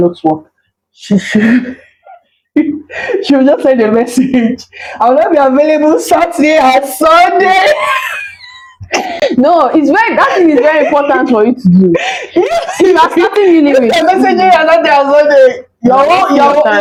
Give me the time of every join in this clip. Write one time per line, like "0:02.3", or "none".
none